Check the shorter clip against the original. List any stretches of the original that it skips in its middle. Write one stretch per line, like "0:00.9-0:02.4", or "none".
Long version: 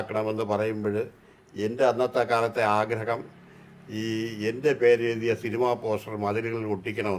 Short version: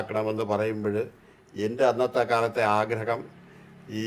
none